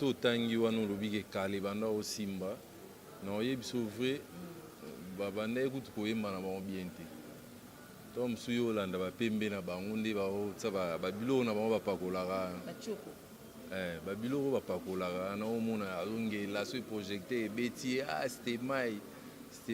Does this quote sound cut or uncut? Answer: uncut